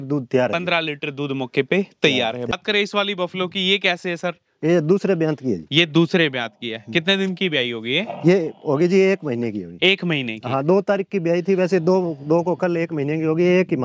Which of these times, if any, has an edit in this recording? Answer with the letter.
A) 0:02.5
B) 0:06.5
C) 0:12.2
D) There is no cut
A